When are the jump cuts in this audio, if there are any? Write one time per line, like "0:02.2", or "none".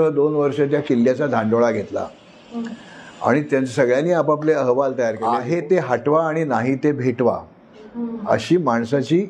0:05.2